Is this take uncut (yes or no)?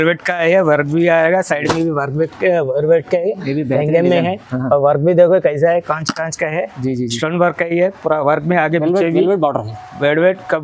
yes